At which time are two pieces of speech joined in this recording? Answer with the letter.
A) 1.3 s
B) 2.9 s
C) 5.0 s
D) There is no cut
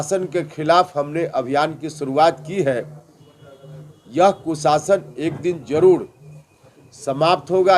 D